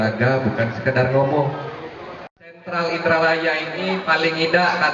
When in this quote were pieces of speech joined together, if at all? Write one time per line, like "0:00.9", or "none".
0:02.4